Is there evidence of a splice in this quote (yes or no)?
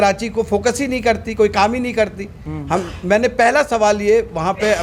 no